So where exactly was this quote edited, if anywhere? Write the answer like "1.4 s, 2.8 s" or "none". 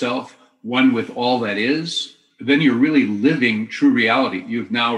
2.3 s

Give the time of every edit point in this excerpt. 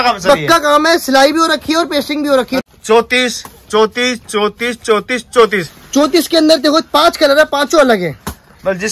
2.6 s

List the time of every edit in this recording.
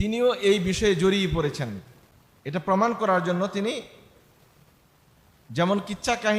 2.6 s

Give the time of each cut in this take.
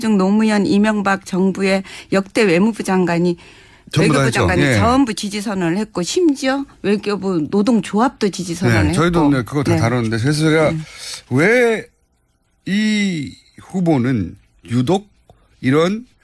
1.8 s

